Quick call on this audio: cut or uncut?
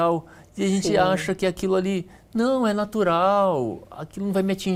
uncut